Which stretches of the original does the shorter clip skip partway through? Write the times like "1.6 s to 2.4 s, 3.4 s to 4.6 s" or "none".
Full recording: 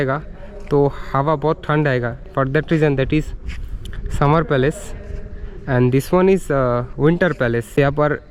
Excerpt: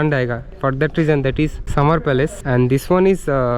3.3 s to 4.1 s, 4.8 s to 5.6 s